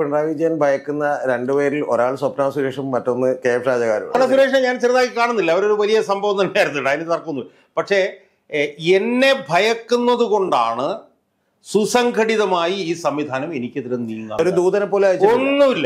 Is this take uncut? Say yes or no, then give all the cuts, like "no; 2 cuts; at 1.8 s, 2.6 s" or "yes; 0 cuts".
no; 2 cuts; at 4.1 s, 14.4 s